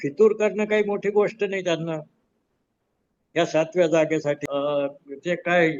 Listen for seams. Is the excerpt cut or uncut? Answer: cut